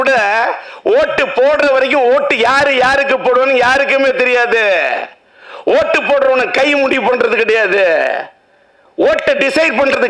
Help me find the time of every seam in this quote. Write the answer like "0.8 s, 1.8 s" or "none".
none